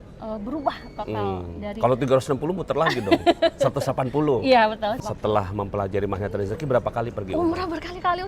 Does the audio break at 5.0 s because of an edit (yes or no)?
yes